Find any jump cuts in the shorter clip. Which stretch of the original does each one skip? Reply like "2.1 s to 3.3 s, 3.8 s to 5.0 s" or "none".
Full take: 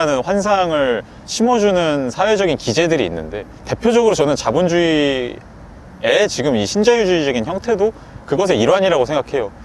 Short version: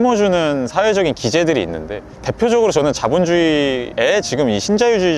5.3 s to 5.9 s